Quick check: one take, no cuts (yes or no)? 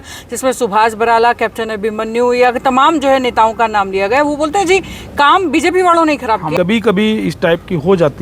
no